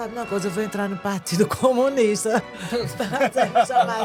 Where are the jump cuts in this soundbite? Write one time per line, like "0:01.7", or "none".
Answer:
none

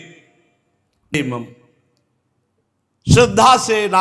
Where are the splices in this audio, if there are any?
0:01.1

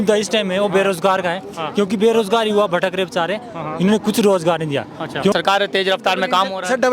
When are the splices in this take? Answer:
0:05.3

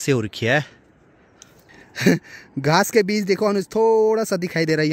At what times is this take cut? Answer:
none

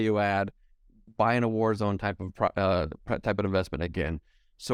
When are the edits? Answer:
none

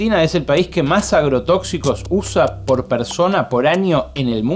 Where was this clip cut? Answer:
none

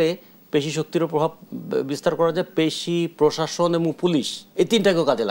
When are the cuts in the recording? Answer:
0:04.4

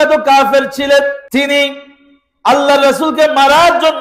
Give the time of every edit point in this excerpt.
0:01.2

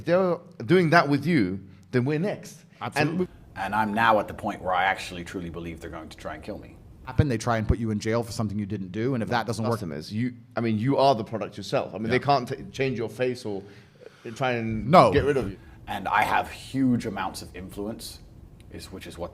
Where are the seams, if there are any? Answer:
0:03.2
0:07.1
0:09.9
0:15.5

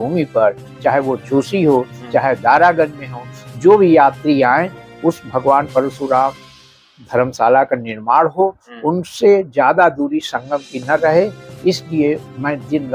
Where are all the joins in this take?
none

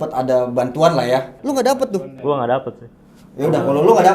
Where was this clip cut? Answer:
0:01.4

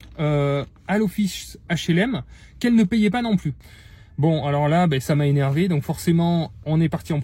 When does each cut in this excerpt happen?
0:03.7

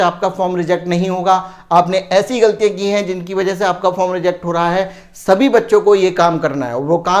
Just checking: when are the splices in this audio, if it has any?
none

